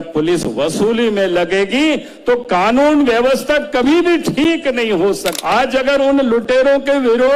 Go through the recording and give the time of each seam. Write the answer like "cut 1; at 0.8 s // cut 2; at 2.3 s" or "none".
cut 1; at 5.4 s